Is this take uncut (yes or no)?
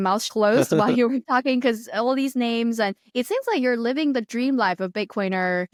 yes